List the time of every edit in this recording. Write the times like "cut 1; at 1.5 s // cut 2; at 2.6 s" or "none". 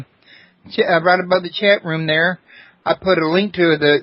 cut 1; at 3.0 s